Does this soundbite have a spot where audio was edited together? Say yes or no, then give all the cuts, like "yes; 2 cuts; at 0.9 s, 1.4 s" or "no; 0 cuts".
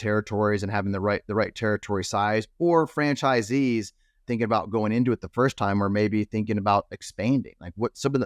yes; 1 cut; at 4.2 s